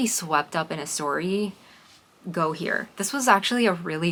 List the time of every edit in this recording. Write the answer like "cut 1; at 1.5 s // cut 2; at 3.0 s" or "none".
none